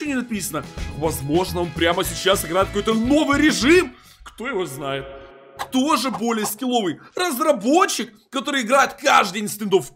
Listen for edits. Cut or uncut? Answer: cut